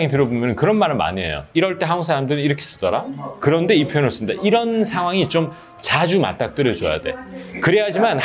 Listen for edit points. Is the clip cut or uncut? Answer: uncut